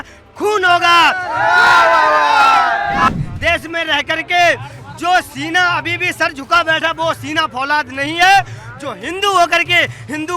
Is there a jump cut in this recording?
yes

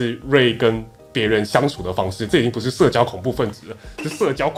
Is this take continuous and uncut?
yes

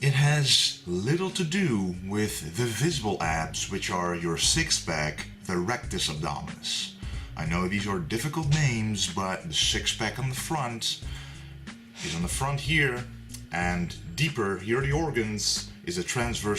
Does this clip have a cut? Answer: yes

